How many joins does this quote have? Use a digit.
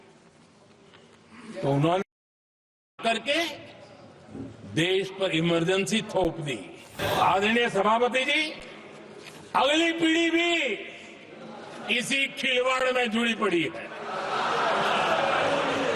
1